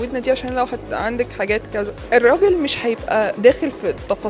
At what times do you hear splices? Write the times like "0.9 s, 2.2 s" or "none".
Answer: 2.0 s, 3.3 s